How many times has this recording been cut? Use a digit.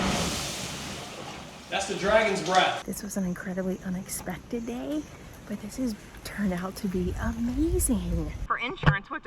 2